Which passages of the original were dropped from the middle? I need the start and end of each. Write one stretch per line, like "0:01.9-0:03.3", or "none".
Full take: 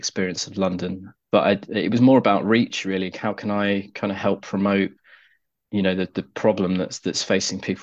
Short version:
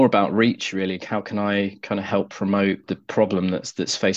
0:05.1-0:06.2

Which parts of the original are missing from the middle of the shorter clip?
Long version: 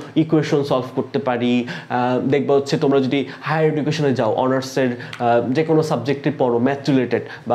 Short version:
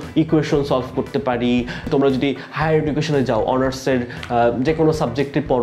0:01.9-0:02.8

